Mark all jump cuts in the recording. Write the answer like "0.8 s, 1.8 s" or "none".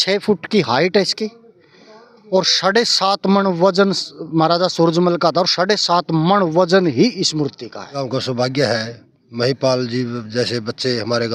8.0 s